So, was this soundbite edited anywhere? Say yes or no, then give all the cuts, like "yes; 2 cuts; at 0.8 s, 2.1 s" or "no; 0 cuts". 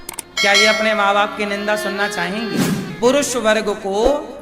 yes; 1 cut; at 2.9 s